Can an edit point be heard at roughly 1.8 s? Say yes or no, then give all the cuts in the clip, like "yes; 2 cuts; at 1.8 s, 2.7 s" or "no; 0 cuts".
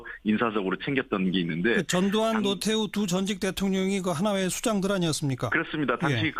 no; 0 cuts